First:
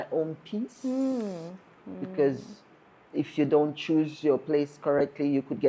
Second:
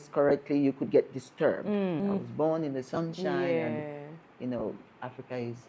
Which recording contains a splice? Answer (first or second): second